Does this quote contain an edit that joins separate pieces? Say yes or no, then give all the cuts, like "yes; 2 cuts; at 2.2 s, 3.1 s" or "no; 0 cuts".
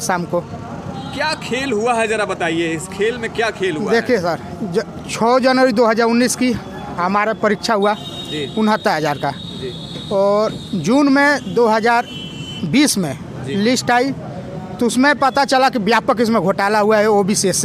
no; 0 cuts